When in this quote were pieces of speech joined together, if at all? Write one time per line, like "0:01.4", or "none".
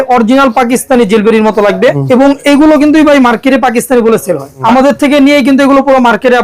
0:02.0
0:04.6